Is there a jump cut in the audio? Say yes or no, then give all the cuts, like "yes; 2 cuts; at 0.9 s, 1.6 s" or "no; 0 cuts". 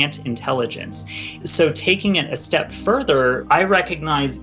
yes; 2 cuts; at 1.4 s, 3.4 s